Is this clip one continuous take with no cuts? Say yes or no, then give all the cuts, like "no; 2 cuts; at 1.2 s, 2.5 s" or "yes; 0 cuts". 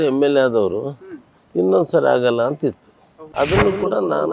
no; 1 cut; at 3.0 s